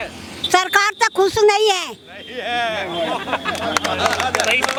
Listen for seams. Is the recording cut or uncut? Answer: uncut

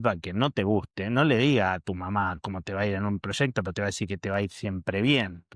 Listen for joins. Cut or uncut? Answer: uncut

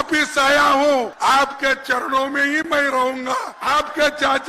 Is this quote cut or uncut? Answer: cut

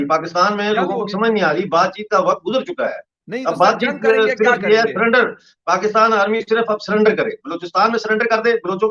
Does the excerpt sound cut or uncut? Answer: uncut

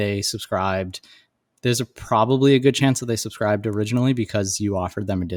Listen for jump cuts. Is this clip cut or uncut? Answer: uncut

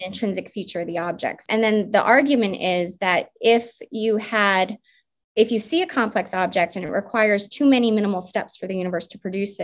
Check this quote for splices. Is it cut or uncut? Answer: cut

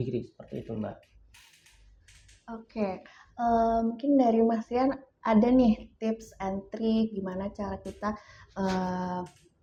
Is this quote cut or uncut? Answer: uncut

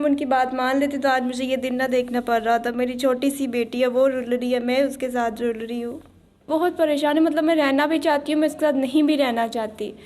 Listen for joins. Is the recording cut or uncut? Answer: cut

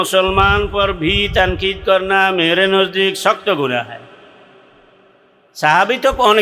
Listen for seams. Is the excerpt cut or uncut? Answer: uncut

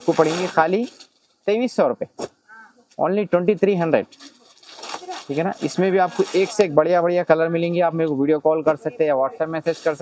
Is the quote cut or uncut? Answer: uncut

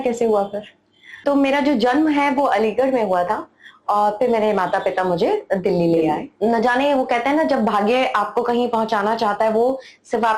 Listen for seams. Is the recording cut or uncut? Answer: cut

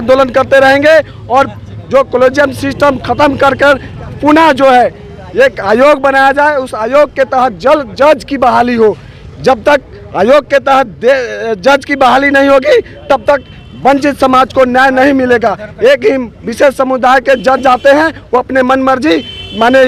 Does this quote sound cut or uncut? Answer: uncut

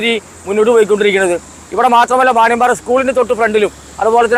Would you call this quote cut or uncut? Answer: uncut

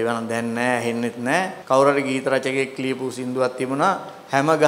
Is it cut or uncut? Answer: cut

